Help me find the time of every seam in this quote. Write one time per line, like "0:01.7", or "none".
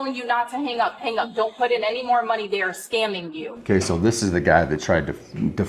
0:03.5